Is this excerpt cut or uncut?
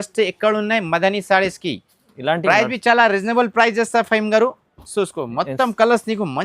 cut